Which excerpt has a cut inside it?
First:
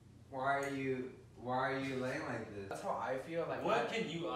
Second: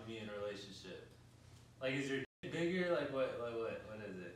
first; 1 cut; at 2.7 s

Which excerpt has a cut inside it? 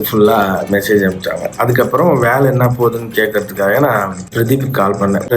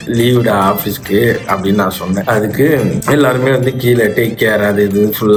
first; 1 cut; at 1.5 s

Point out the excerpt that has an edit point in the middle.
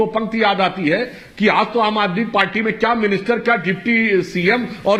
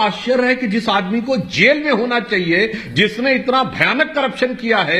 first; 1 cut; at 1.2 s

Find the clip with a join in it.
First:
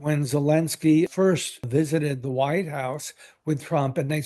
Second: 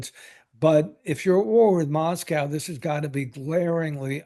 first; 1 cut; at 1.2 s

